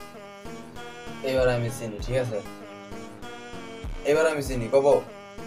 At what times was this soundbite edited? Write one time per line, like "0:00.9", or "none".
none